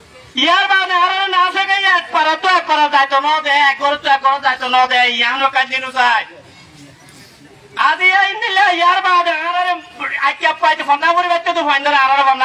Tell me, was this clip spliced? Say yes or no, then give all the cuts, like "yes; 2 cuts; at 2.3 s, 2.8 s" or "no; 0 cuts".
no; 0 cuts